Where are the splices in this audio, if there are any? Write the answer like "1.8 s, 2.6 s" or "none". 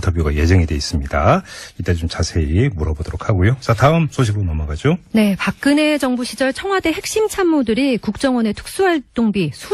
7.9 s